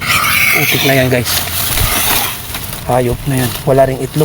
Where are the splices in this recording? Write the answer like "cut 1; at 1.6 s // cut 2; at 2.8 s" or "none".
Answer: none

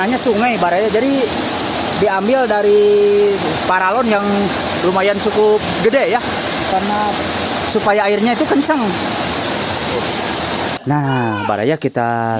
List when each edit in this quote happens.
cut 1; at 10.8 s

